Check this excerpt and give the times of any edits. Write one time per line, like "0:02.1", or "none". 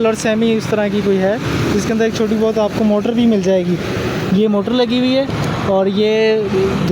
none